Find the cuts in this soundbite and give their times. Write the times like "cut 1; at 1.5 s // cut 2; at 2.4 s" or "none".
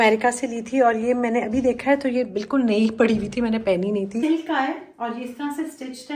cut 1; at 4.2 s